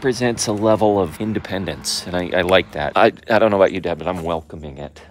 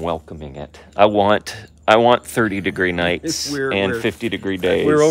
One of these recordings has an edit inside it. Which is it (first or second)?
first